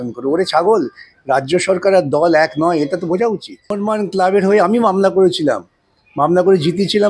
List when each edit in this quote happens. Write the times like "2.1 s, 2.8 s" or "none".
3.8 s